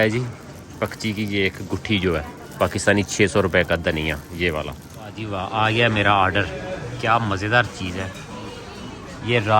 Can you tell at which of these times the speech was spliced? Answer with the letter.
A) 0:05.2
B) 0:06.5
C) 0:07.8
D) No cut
A